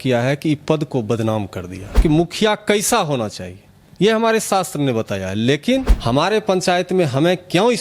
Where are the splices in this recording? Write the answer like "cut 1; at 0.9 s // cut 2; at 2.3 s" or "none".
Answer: cut 1; at 2.0 s // cut 2; at 5.9 s

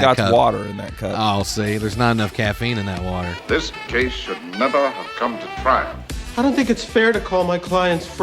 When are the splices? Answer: cut 1; at 3.3 s

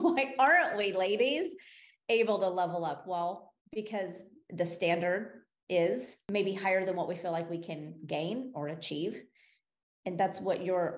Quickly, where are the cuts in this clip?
cut 1; at 3.5 s // cut 2; at 6.1 s

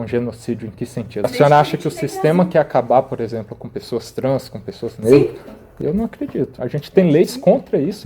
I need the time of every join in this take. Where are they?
cut 1; at 1.2 s

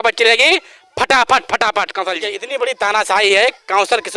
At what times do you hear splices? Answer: cut 1; at 2.3 s

